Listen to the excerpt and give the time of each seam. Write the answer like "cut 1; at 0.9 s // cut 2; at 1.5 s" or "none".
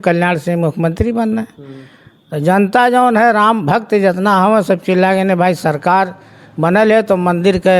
none